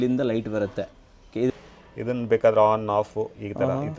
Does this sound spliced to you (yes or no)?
yes